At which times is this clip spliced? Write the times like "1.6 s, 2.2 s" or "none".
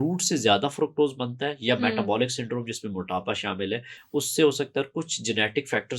none